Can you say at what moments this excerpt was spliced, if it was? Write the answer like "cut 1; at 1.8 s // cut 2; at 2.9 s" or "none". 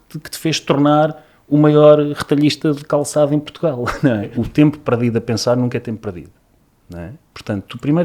cut 1; at 4.3 s